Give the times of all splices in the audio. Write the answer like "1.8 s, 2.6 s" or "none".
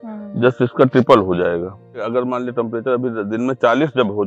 2.1 s